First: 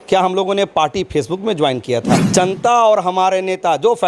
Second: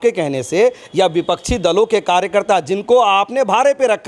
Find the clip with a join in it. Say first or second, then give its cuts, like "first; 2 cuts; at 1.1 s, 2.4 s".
first; 1 cut; at 2.2 s